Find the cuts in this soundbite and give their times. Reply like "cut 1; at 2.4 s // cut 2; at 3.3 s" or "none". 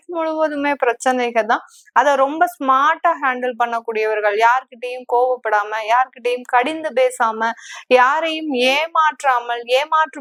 none

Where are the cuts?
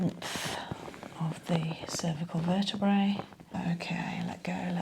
cut 1; at 3.5 s

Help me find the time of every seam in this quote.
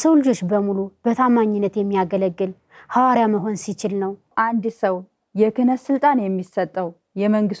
cut 1; at 4.3 s

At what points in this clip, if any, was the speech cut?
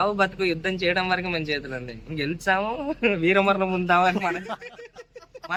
none

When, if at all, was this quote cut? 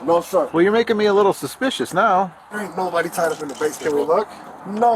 cut 1; at 2.4 s

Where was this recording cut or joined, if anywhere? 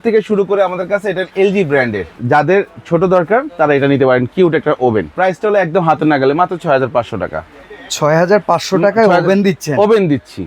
cut 1; at 2.1 s // cut 2; at 5.1 s

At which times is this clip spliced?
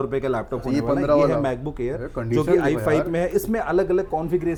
none

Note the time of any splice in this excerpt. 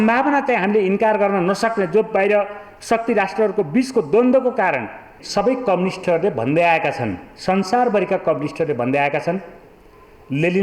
cut 1; at 5.2 s

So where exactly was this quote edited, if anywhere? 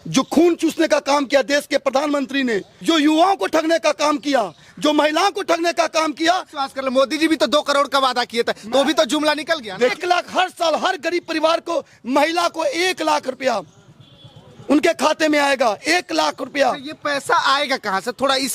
cut 1; at 2.7 s // cut 2; at 6.6 s // cut 3; at 9.9 s

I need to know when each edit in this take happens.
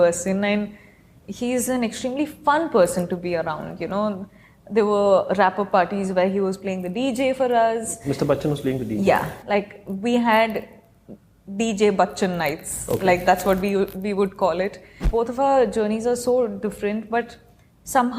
cut 1; at 15.0 s

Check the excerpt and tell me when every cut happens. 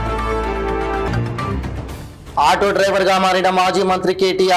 cut 1; at 1.1 s

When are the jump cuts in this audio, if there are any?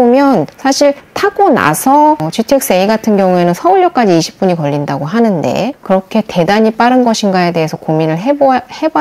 cut 1; at 5.8 s

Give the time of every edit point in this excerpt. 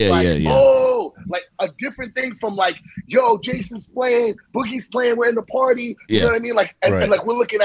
none

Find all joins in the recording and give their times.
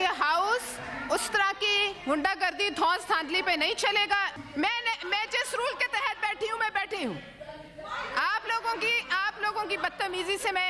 cut 1; at 4.3 s

